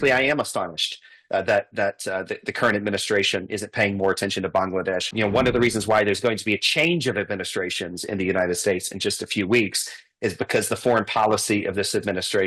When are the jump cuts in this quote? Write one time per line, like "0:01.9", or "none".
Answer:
0:05.1